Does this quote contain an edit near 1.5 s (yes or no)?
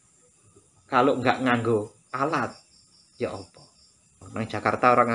no